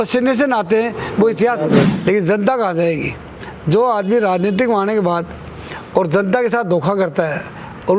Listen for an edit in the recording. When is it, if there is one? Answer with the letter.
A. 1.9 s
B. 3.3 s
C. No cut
A